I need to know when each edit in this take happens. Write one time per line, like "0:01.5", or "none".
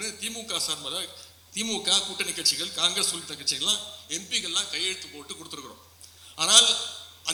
none